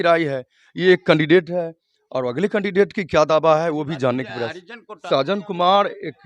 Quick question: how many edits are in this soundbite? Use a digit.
1